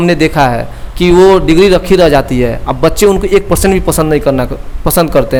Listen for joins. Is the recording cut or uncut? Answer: uncut